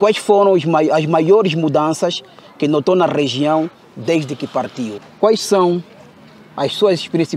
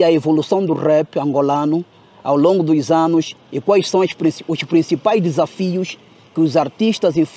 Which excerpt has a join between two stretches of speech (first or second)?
first